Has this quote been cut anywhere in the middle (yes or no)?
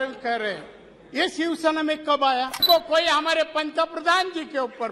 yes